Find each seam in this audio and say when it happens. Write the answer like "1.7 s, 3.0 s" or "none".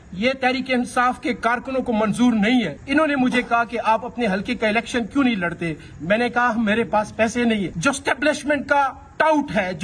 2.8 s, 7.7 s